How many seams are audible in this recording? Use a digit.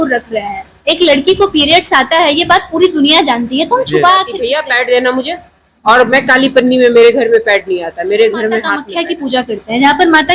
2